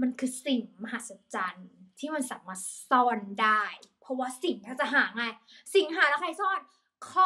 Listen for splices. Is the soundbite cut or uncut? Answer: uncut